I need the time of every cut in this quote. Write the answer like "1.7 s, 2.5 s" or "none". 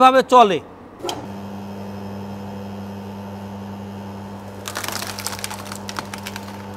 1.2 s